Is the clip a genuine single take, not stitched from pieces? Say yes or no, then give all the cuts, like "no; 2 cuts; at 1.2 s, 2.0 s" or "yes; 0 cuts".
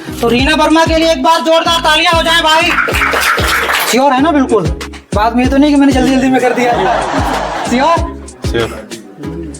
no; 1 cut; at 3.8 s